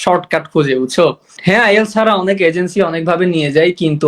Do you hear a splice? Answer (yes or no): yes